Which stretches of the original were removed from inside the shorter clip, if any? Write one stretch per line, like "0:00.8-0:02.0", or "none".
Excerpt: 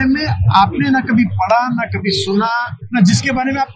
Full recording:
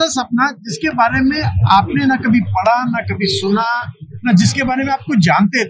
0:03.9-0:04.1